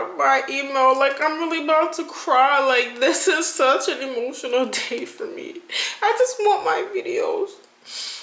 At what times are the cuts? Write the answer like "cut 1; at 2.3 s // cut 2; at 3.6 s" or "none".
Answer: none